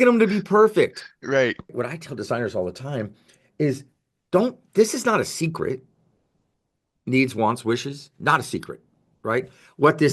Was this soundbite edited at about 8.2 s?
no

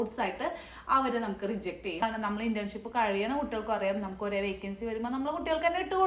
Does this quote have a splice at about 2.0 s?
yes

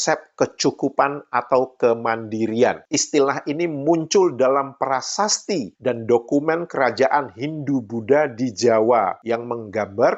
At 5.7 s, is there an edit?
no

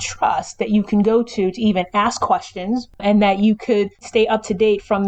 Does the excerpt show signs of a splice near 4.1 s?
yes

